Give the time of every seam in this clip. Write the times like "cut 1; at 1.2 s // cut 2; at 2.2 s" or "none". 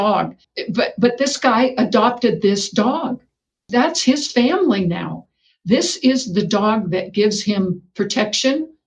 cut 1; at 3.6 s